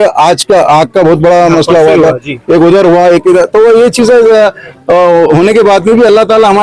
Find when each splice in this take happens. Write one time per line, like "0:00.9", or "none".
none